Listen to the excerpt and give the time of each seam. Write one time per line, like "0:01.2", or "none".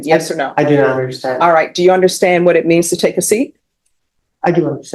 none